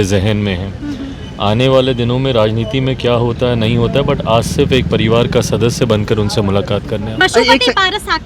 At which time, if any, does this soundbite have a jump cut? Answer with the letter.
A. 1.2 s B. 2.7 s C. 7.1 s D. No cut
C